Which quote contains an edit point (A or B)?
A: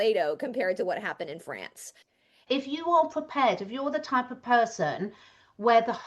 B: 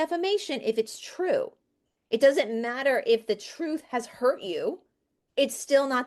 A